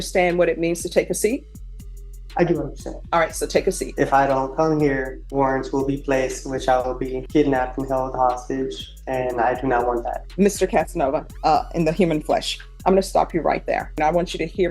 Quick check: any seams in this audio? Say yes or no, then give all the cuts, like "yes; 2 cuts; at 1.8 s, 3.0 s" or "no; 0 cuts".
yes; 6 cuts; at 3.9 s, 5.2 s, 7.2 s, 10.2 s, 11.3 s, 13.9 s